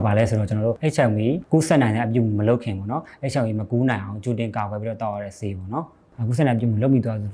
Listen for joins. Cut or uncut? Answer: cut